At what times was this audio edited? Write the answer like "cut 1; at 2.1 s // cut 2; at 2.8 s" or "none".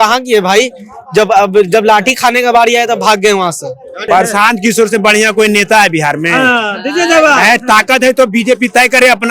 cut 1; at 4.0 s

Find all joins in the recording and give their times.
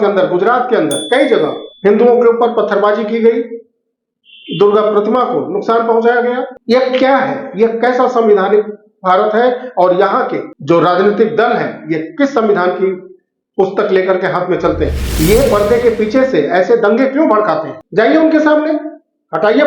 cut 1; at 17.8 s

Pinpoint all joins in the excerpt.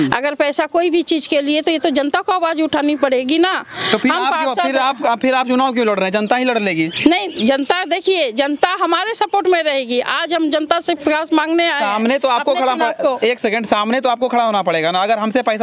none

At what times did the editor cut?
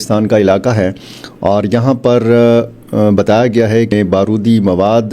cut 1; at 3.9 s

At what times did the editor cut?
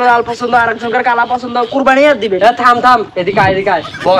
none

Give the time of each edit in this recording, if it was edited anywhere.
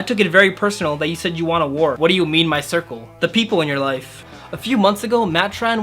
cut 1; at 2.0 s // cut 2; at 4.2 s

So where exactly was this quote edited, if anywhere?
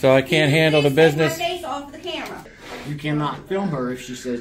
cut 1; at 2.4 s

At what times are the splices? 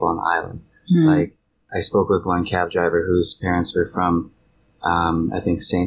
cut 1; at 1.6 s

